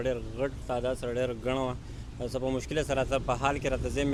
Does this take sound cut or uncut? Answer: uncut